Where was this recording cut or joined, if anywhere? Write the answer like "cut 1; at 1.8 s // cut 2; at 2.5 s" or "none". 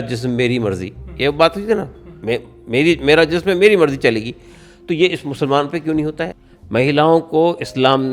cut 1; at 6.3 s